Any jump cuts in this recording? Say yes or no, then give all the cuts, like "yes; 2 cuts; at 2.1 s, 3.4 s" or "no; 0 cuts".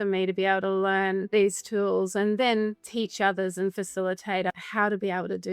yes; 3 cuts; at 1.2 s, 2.8 s, 4.5 s